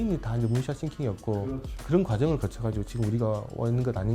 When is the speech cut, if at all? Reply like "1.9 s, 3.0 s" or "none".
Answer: 1.4 s

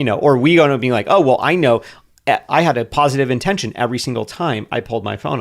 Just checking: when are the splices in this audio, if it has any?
2.5 s

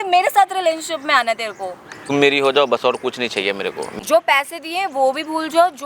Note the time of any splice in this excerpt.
2.1 s, 3.9 s

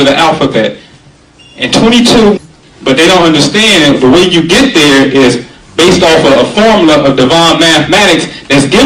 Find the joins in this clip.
none

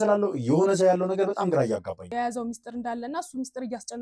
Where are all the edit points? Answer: 2.1 s

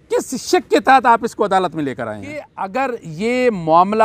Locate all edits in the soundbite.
2.5 s

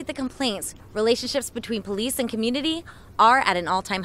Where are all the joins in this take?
none

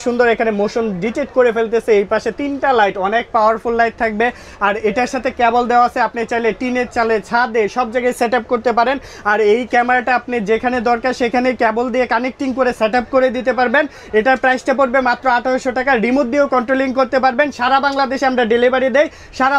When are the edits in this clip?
none

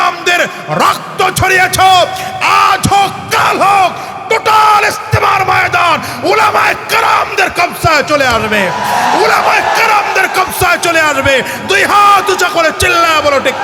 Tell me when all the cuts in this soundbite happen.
none

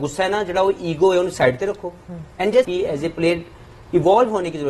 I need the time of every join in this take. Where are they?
2.7 s

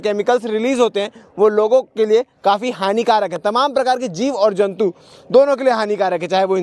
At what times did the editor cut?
none

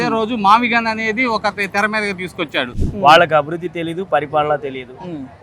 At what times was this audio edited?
2.7 s

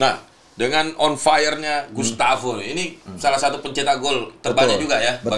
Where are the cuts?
none

